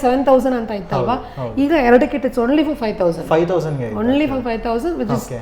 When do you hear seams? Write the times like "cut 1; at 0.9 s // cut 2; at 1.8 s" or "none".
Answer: none